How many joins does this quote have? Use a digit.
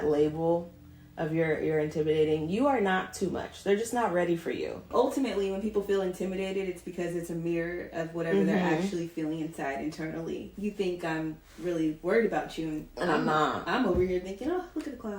2